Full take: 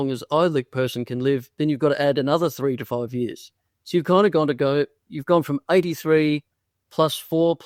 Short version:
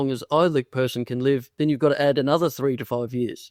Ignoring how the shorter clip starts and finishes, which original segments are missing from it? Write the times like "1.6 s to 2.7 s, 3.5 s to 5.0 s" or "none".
none